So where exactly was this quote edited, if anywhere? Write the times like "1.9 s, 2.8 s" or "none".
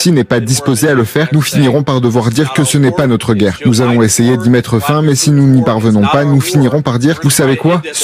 none